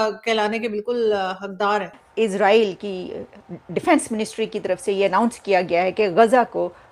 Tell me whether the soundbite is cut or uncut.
cut